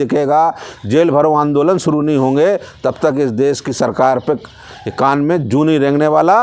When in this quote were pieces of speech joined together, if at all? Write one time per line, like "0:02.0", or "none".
none